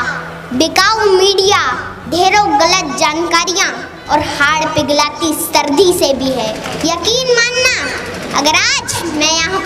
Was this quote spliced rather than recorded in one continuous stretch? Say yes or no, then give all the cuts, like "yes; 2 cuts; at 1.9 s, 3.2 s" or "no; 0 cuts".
yes; 1 cut; at 6.7 s